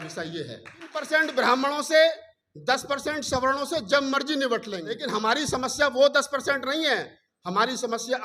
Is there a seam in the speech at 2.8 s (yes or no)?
no